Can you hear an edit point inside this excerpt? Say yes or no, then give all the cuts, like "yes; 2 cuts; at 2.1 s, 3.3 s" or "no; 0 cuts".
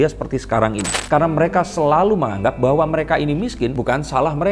yes; 1 cut; at 0.9 s